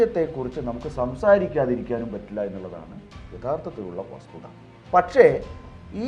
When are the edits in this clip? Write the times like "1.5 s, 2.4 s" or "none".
4.7 s